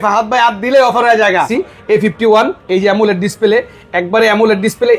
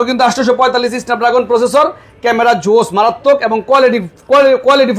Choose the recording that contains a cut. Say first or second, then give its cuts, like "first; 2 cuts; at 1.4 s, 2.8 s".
first; 1 cut; at 1.5 s